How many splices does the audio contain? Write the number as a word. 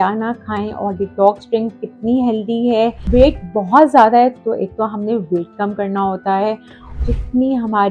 two